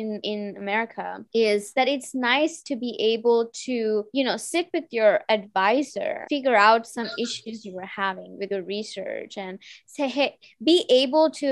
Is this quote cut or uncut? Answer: cut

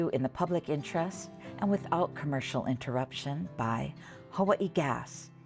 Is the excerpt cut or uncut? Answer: uncut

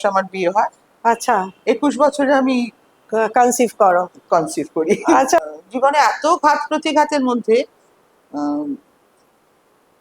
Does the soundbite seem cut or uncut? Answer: cut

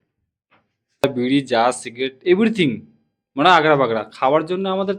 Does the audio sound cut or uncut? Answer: cut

